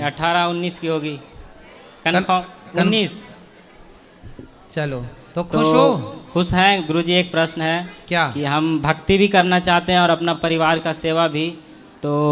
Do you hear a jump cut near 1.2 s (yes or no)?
no